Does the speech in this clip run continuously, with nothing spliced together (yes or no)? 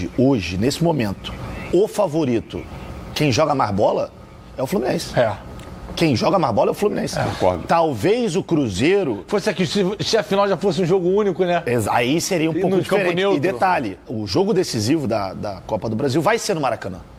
yes